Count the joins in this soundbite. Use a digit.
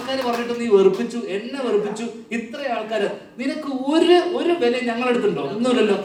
0